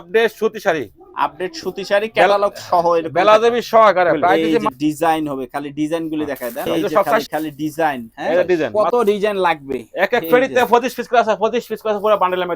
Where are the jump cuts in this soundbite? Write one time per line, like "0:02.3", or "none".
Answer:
0:04.5
0:07.2
0:08.7